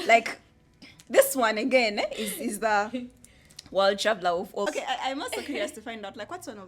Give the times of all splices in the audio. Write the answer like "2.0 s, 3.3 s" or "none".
4.7 s

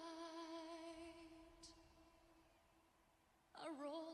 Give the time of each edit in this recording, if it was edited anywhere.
none

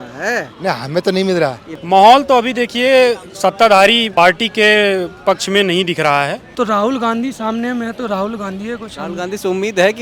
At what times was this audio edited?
1.7 s, 4.1 s, 6.4 s

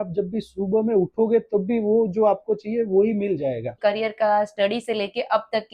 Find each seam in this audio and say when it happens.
3.7 s

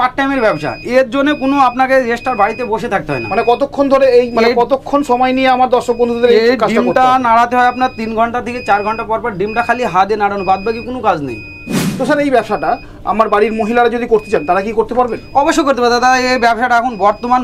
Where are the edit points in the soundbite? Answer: none

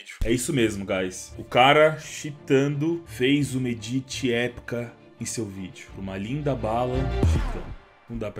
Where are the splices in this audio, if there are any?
none

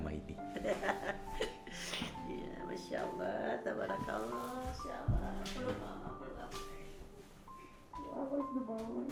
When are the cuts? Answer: none

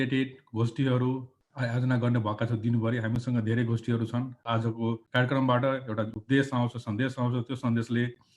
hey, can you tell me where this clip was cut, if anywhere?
1.4 s, 4.6 s

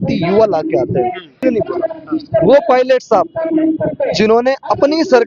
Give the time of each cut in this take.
1.3 s

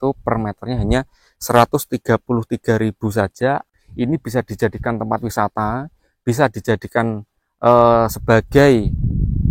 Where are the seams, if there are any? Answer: 3.8 s

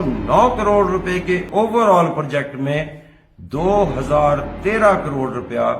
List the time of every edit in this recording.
1.4 s

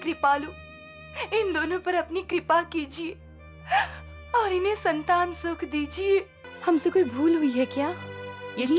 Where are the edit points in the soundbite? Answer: 6.4 s

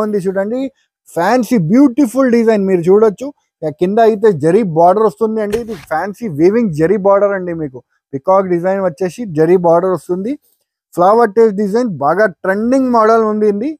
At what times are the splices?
none

